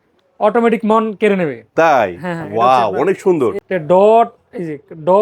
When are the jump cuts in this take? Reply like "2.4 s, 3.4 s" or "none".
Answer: 3.6 s